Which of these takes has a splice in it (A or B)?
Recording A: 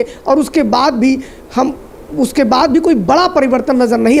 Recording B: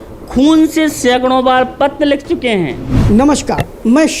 B